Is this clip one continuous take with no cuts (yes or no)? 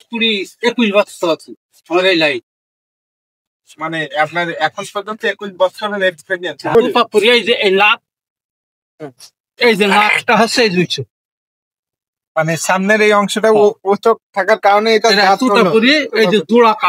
no